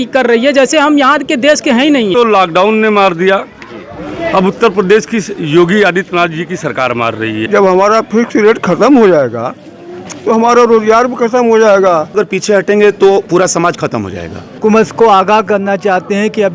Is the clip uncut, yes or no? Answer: no